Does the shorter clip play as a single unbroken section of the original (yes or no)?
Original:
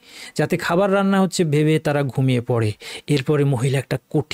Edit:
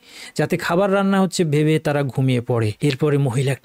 no